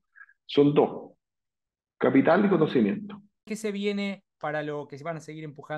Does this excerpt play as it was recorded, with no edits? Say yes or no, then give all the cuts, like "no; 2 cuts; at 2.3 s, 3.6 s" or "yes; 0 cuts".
no; 1 cut; at 3.5 s